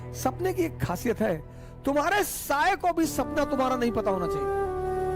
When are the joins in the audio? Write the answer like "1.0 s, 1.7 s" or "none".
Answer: 4.2 s